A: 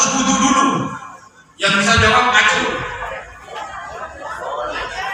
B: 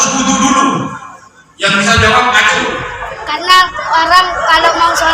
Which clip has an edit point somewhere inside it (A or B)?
B